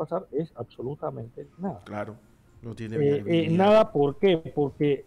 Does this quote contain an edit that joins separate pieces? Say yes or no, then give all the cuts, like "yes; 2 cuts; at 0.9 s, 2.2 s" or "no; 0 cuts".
no; 0 cuts